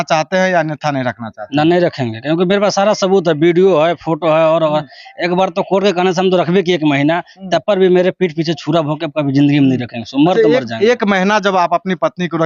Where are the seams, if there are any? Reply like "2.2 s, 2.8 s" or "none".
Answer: none